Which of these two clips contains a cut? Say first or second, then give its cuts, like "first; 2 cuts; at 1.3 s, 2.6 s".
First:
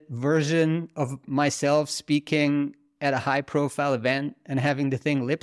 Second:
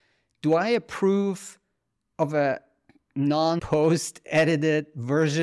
second; 1 cut; at 3.6 s